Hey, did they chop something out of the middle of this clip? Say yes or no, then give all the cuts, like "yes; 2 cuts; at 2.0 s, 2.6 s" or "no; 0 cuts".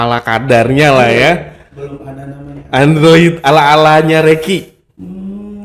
no; 0 cuts